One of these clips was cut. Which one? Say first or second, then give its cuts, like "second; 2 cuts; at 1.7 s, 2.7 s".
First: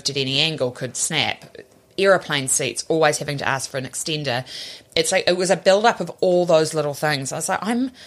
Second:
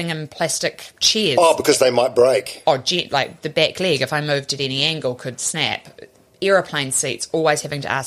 second; 1 cut; at 0.9 s